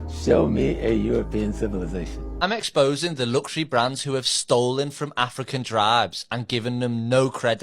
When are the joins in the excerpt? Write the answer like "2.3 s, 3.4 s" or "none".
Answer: 2.2 s

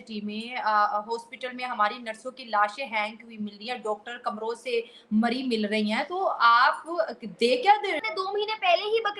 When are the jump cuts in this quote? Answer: 8.0 s

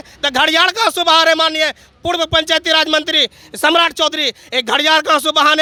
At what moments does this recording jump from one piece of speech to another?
none

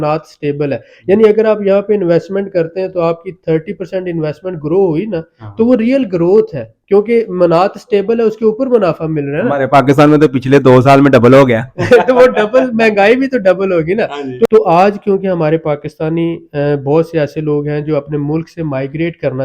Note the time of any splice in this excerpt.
14.5 s

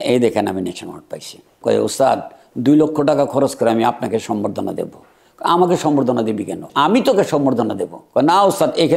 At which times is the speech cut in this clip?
1.6 s, 6.6 s

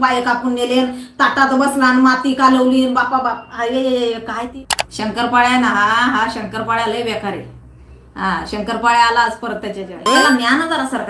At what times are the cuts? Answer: 4.5 s, 9.9 s

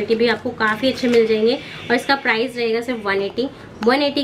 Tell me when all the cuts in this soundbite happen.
none

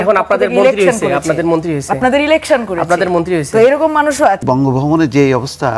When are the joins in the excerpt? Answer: 4.4 s

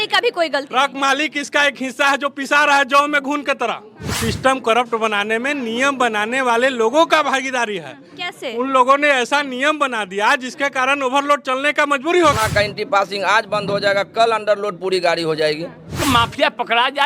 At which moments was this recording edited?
4.2 s, 12.4 s, 16.0 s

